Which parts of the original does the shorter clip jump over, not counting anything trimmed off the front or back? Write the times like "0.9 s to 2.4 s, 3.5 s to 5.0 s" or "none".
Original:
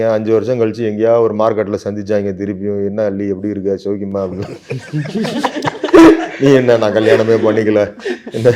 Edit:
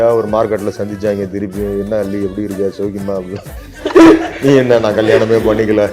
4.8 s to 5.8 s